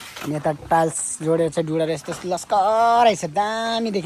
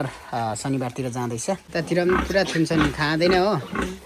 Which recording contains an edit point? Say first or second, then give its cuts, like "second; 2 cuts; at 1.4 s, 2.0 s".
second; 1 cut; at 1.7 s